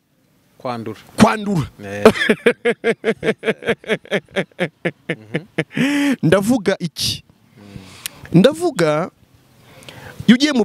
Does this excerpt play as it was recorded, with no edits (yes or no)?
yes